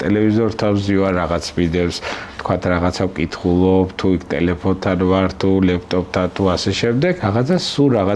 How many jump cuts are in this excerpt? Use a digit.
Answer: 1